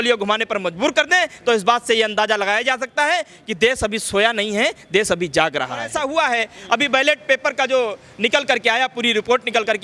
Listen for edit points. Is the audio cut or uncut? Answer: cut